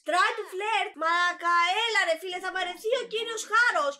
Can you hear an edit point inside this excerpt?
yes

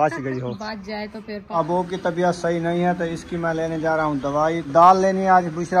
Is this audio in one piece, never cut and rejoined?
no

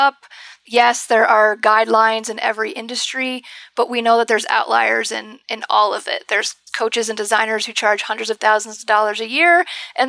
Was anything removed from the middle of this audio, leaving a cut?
no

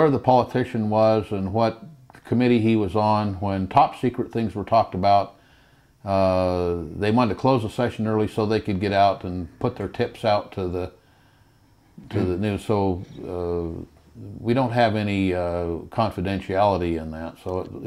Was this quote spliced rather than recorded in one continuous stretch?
no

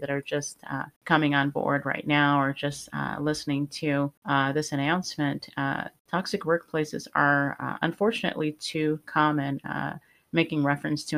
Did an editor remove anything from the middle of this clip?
yes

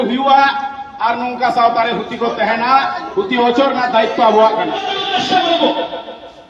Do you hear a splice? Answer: yes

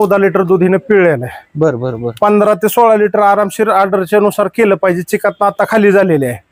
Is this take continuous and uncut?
yes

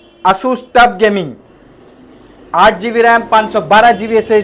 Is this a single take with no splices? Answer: yes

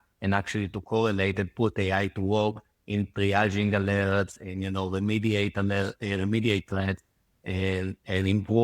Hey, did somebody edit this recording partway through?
no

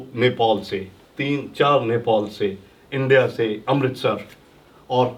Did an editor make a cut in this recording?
no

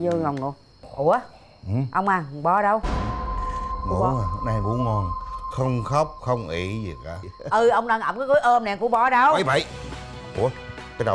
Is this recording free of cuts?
yes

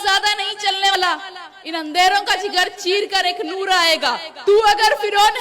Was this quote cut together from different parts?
yes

